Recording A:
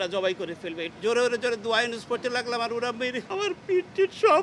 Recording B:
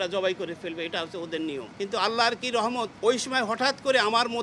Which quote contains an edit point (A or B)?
A